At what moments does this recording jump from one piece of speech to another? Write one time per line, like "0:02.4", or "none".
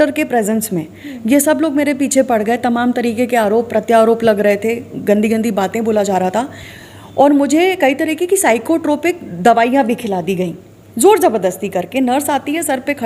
none